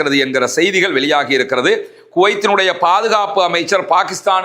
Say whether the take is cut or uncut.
uncut